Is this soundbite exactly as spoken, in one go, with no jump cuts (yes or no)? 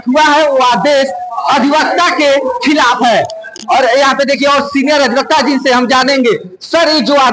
yes